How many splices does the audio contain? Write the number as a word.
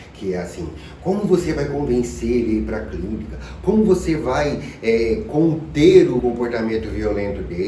one